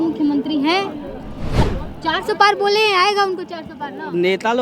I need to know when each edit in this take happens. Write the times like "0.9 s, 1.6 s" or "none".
1.6 s